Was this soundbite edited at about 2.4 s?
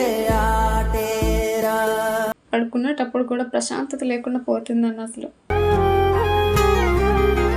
yes; 1 cut; at 2.4 s

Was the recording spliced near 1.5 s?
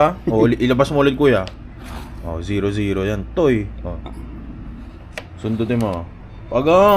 no; 0 cuts

